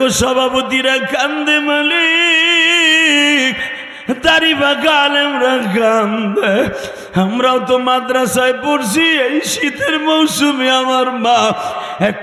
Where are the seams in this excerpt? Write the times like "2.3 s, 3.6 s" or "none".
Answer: none